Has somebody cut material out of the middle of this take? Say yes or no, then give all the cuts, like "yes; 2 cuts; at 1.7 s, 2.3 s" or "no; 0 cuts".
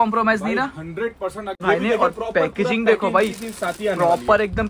yes; 1 cut; at 1.6 s